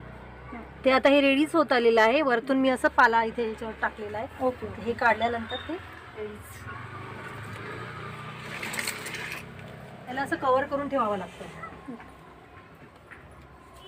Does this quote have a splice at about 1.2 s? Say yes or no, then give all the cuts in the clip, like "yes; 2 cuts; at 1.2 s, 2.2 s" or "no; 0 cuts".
no; 0 cuts